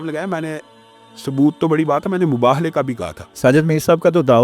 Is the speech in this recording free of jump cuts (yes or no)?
no